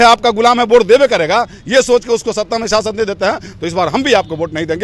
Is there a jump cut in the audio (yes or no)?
no